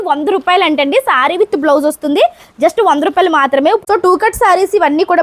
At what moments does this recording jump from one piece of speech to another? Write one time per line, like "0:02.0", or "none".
0:03.8